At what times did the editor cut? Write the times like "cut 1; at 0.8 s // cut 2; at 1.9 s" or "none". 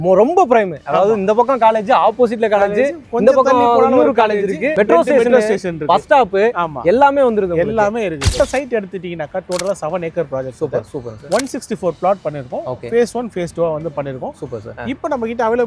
cut 1; at 8.3 s // cut 2; at 14.7 s